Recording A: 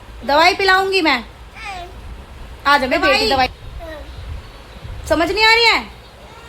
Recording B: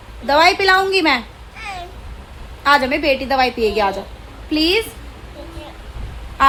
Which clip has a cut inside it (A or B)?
A